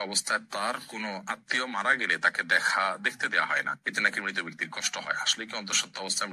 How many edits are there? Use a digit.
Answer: 0